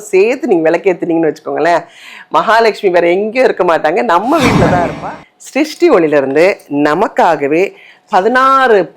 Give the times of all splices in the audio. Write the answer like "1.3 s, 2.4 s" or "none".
4.9 s

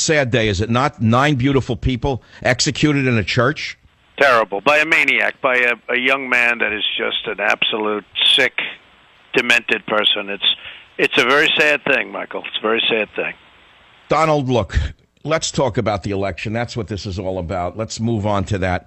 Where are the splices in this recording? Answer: 6.0 s

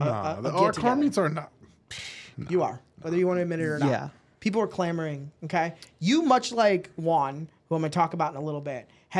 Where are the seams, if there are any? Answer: none

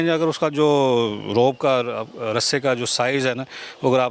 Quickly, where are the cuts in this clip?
none

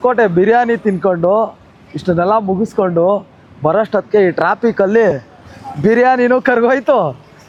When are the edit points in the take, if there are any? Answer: none

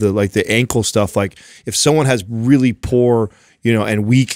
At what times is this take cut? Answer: none

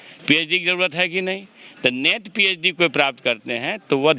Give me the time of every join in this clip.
none

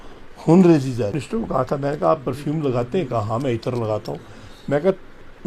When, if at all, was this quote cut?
1.1 s

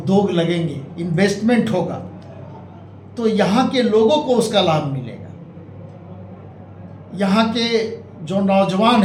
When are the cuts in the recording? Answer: none

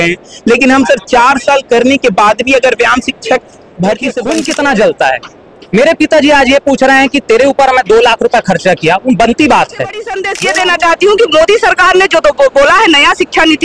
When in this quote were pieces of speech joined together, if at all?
4.2 s, 10.2 s

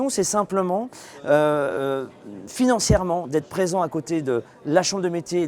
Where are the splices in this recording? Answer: none

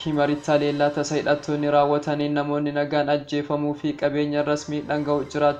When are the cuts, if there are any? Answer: none

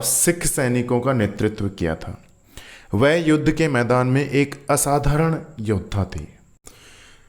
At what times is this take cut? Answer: none

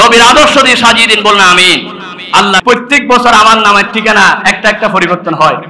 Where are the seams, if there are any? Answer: 2.6 s

